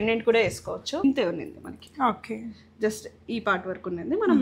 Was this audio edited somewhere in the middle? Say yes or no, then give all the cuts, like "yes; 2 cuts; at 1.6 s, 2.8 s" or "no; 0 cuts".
yes; 1 cut; at 1.0 s